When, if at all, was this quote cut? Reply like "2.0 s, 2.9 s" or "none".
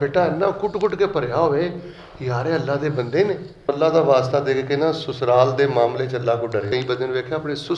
3.7 s, 6.7 s